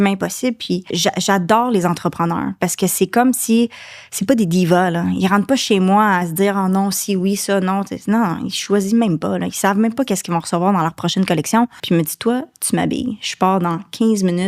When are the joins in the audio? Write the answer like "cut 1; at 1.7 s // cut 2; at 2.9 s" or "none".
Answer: cut 1; at 0.9 s // cut 2; at 11.8 s